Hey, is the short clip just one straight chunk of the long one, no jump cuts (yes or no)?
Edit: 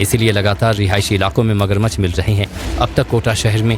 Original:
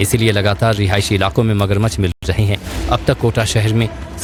no